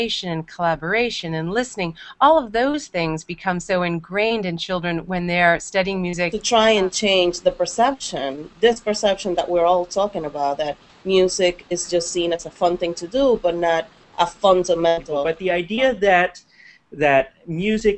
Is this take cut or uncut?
cut